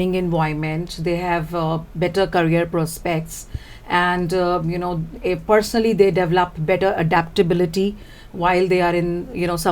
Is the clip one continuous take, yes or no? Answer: yes